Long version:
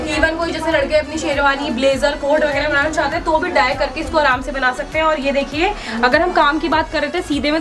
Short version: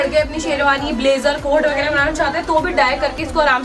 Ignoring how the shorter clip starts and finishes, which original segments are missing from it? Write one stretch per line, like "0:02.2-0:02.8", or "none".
none